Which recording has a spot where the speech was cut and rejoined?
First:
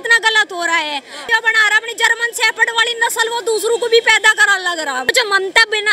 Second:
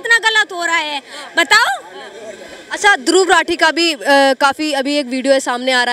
first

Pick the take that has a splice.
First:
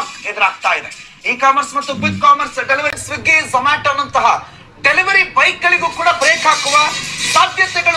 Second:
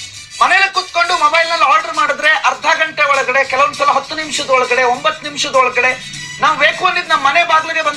first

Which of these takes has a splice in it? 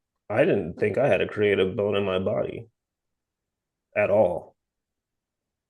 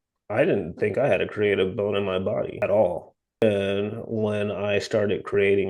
second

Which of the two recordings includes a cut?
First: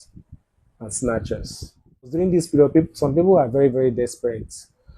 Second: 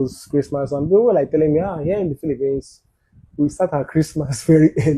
first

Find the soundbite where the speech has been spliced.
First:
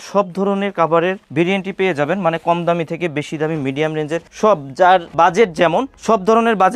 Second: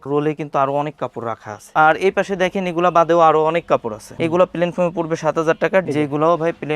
second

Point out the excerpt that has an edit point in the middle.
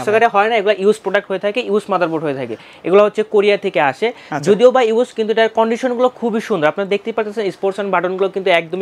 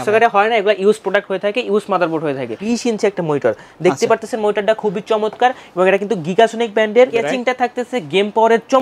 second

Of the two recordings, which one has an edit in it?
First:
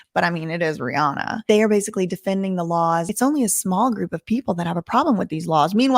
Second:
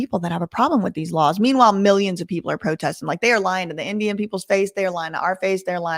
first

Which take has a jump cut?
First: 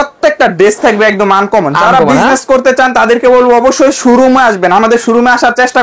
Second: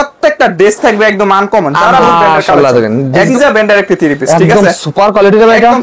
second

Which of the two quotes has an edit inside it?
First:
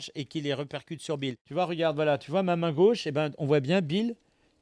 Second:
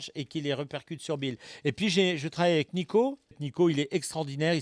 first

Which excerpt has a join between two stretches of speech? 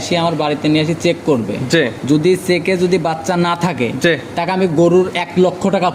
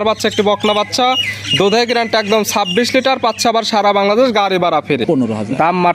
second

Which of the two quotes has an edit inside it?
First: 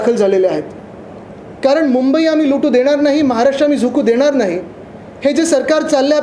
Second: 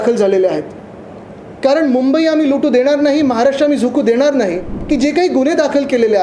second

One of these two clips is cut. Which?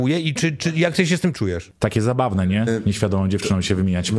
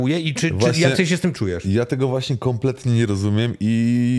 first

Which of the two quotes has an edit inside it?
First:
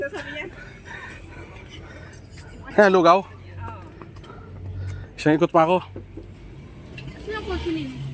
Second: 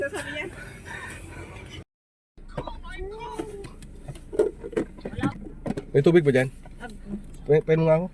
second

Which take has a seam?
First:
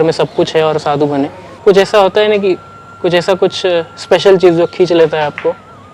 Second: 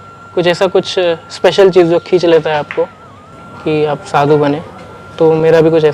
first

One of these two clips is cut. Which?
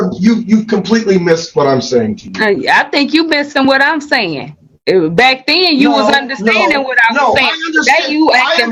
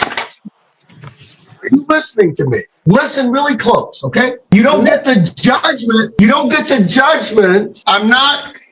second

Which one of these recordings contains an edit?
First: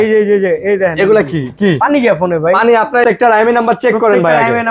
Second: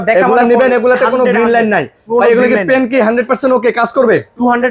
first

